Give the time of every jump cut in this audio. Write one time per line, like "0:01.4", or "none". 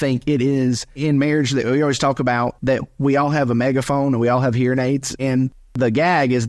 0:01.0
0:02.6
0:05.1